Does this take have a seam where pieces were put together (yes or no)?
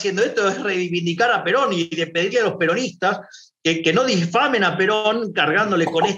no